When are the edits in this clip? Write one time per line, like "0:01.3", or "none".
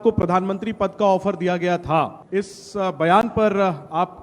0:02.2